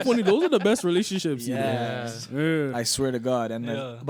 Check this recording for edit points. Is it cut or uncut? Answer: uncut